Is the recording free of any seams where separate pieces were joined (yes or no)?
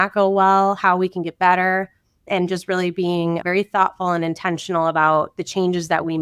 no